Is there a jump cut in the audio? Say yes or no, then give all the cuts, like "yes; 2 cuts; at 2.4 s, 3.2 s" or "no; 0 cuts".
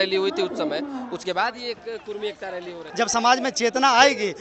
yes; 1 cut; at 2.8 s